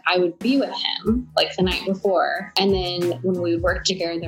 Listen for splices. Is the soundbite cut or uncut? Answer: uncut